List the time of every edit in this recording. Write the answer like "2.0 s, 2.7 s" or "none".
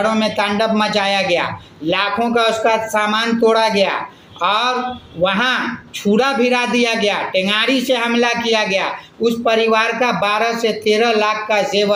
none

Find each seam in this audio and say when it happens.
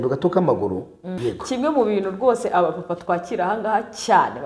1.0 s

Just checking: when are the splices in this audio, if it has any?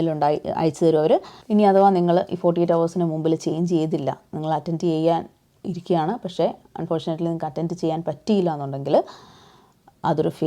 1.3 s

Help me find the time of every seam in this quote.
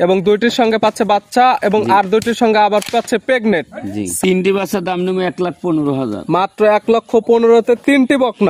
4.2 s

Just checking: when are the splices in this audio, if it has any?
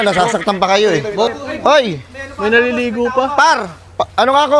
1.3 s

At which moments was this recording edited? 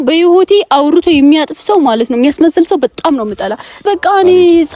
3.8 s

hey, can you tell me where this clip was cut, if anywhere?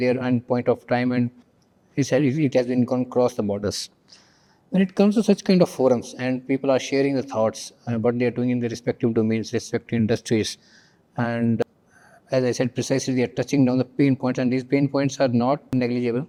none

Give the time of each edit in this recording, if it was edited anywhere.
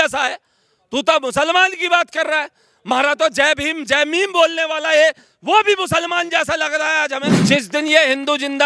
7.3 s

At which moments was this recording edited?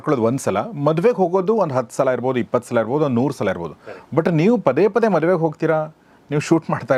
none

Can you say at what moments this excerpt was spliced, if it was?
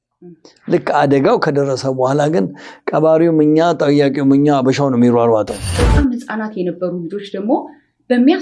5.8 s

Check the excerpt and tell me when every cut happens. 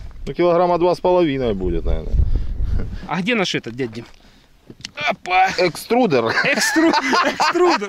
2.9 s

